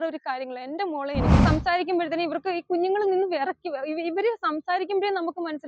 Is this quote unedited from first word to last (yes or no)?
no